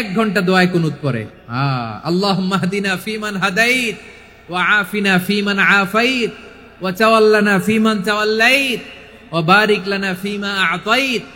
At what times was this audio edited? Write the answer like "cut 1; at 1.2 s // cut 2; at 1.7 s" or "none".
cut 1; at 1.3 s